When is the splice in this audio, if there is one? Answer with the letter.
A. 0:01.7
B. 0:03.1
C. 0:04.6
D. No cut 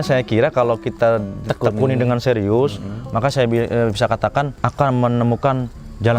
C